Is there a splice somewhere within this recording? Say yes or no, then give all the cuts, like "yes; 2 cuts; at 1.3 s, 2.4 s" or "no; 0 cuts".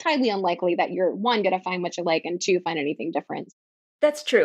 yes; 1 cut; at 3.4 s